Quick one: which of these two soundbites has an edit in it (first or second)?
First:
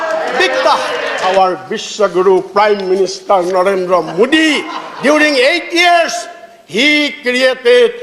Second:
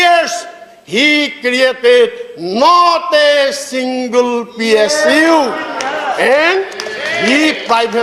first